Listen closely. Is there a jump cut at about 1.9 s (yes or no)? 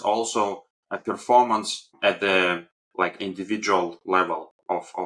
yes